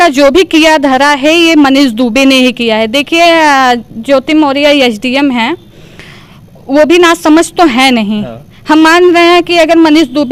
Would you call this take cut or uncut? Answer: uncut